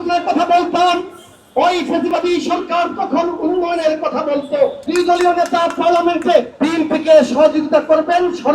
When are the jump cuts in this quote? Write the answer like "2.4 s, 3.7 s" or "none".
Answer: 4.8 s, 6.5 s